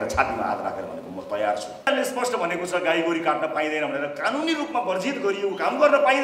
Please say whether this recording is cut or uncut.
cut